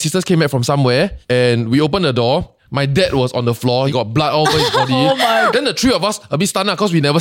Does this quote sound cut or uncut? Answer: cut